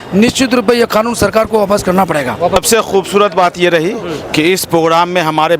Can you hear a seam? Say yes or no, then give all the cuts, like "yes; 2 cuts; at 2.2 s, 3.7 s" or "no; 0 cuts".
no; 0 cuts